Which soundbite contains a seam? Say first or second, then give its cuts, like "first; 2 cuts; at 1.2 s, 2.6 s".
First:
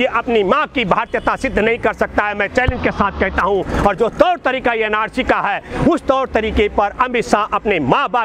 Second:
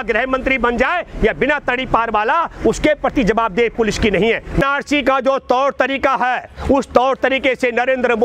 second; 1 cut; at 4.6 s